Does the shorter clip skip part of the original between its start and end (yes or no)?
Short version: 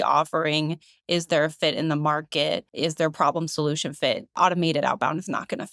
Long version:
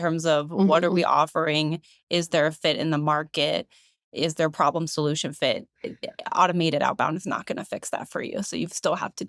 yes